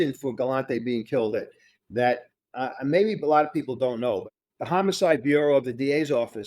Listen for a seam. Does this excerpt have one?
yes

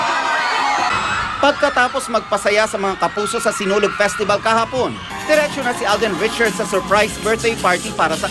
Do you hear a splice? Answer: yes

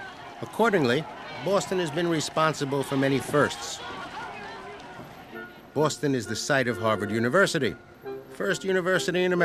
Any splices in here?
no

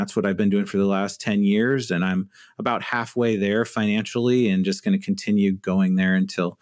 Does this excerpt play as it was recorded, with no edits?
yes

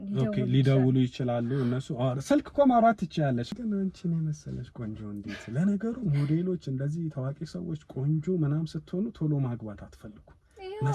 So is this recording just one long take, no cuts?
no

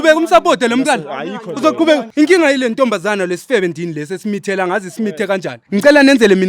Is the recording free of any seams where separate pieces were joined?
no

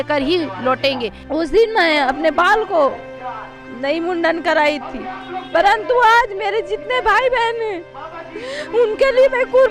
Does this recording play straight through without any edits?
no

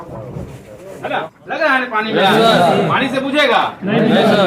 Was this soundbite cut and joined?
yes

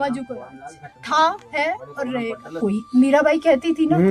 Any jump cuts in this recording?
yes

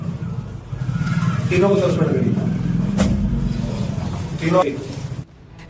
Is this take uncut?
yes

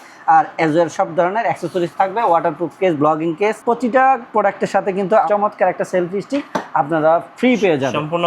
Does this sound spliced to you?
yes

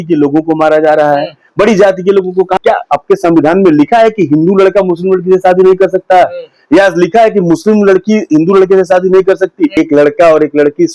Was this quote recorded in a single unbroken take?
no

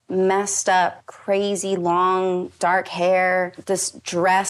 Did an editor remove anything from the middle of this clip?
yes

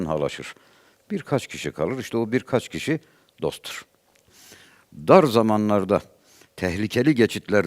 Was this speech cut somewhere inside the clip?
yes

